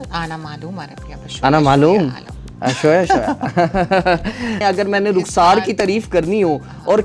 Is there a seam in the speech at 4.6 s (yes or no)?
no